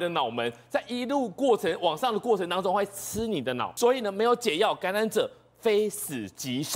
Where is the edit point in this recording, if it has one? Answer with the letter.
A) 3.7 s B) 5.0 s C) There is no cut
A